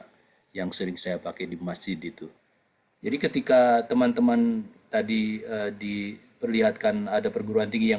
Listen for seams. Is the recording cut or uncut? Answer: cut